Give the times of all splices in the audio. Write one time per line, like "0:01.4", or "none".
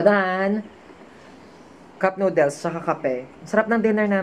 none